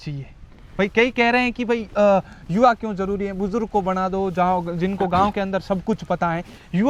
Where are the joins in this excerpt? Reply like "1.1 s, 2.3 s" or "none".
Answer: none